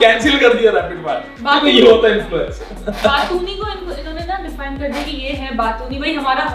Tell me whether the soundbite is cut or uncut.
uncut